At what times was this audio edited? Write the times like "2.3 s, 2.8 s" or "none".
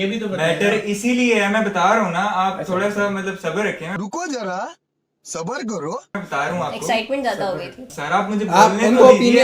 7.8 s